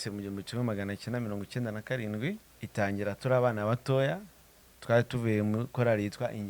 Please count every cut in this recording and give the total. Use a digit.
1